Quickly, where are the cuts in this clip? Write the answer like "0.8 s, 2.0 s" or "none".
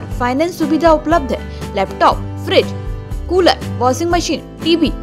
none